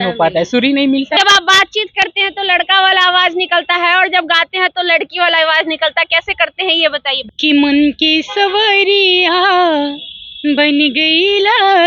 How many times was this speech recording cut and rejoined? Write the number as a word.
two